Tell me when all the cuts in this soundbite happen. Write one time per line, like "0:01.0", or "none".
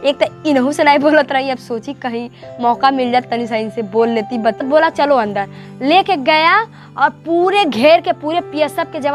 0:04.6